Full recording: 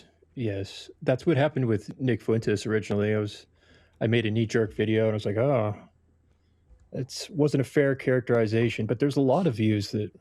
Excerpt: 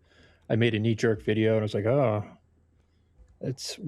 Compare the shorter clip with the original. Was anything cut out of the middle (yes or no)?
no